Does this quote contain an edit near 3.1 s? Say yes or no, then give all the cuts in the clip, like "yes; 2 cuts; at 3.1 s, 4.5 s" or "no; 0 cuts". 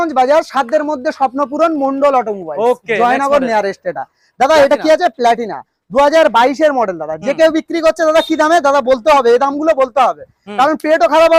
no; 0 cuts